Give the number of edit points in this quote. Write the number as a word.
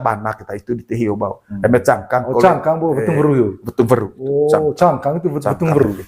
zero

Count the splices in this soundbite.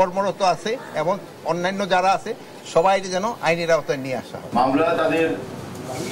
one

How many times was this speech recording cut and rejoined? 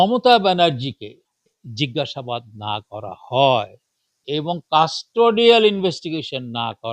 one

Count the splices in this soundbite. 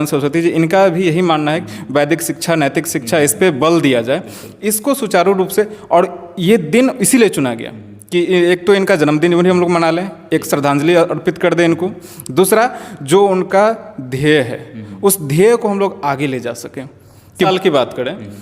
one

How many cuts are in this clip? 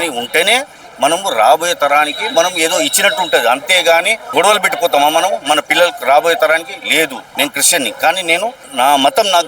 three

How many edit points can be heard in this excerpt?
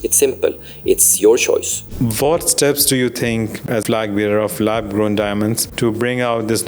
three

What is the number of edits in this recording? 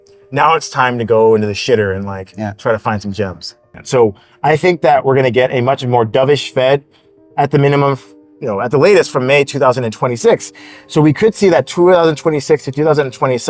one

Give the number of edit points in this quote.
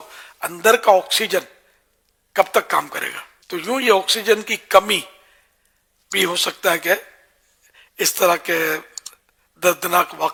zero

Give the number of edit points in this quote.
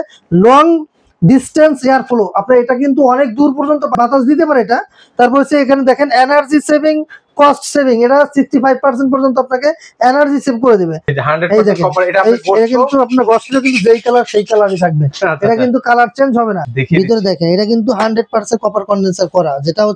three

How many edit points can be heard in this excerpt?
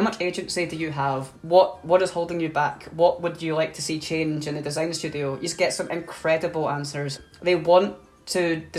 two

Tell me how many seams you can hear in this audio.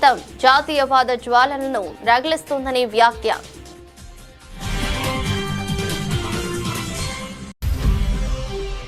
zero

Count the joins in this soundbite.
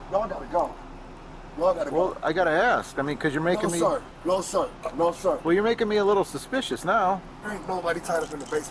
one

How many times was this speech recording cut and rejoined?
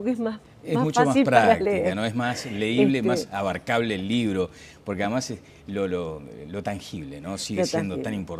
zero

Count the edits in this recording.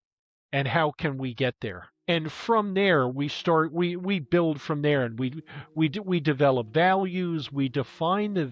one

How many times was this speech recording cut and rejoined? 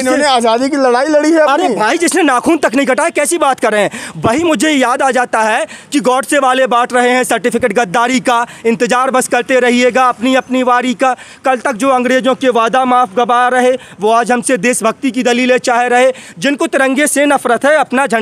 zero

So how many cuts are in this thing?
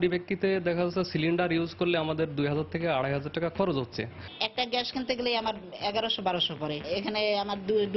one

